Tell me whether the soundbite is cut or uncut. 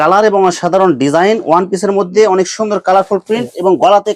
uncut